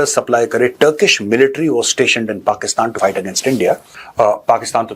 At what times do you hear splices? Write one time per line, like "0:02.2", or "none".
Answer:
0:04.0

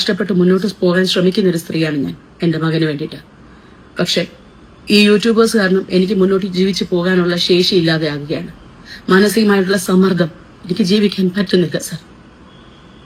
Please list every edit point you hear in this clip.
none

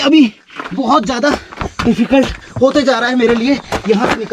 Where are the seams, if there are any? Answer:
none

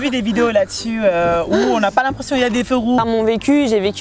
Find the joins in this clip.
0:03.0

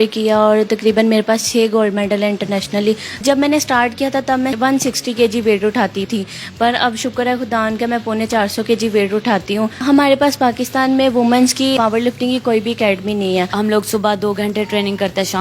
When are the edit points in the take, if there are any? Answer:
0:03.2
0:04.5
0:06.1
0:09.8
0:11.8
0:13.5

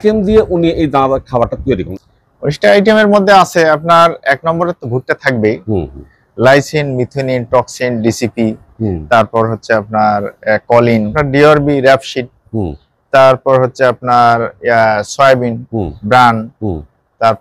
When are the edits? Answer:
0:01.9
0:11.2

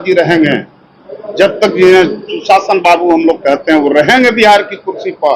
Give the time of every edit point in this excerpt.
none

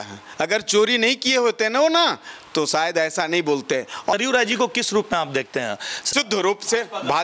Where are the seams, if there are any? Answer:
0:04.1
0:06.1

